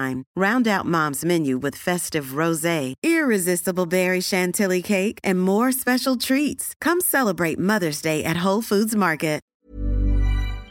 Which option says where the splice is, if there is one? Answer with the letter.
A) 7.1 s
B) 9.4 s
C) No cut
B